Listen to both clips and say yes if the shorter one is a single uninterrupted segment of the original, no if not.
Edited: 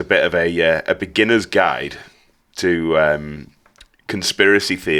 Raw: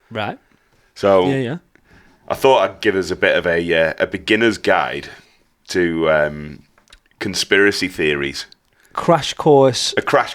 yes